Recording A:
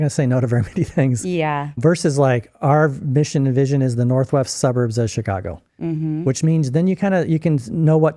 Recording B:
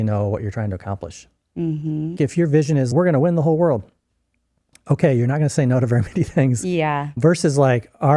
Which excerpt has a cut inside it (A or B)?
B